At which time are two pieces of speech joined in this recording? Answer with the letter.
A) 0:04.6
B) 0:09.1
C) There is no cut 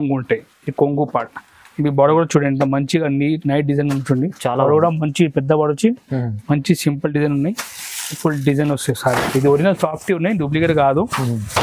B